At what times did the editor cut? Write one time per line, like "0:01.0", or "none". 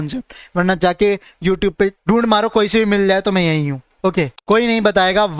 0:02.0
0:04.4